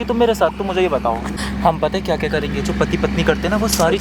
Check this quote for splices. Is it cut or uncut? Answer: cut